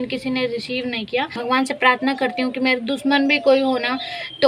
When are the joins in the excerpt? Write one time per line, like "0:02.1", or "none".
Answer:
0:01.4